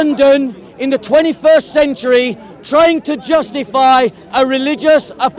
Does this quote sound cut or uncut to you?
uncut